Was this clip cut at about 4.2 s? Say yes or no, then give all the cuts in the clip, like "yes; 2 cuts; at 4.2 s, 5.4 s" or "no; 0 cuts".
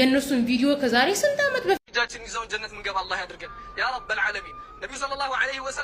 no; 1 cut; at 1.8 s